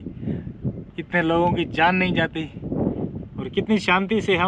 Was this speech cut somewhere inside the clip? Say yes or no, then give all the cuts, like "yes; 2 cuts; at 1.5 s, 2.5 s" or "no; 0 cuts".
no; 0 cuts